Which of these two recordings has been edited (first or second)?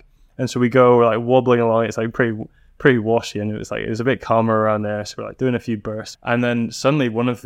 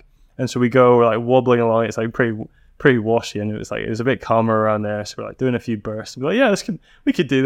first